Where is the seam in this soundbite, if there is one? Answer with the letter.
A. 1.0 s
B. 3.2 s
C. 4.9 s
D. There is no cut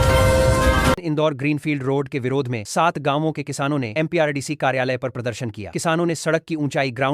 A